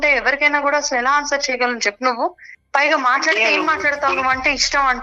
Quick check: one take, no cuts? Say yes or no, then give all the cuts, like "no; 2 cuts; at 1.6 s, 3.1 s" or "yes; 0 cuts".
yes; 0 cuts